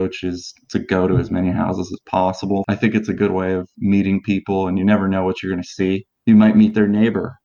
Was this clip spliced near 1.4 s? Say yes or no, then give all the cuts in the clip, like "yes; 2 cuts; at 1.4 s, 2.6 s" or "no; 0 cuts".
no; 2 cuts; at 2.6 s, 6.1 s